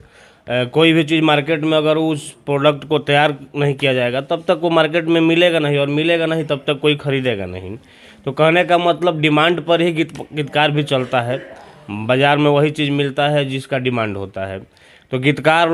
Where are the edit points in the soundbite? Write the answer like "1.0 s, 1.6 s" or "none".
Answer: none